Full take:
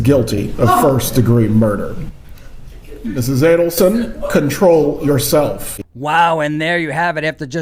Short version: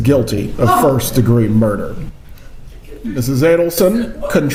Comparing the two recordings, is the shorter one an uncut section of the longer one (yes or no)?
yes